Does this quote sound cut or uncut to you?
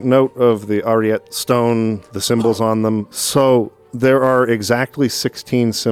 cut